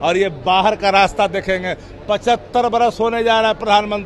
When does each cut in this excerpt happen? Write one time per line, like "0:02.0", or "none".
none